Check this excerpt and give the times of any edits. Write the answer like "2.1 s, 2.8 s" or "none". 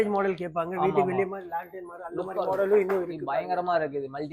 none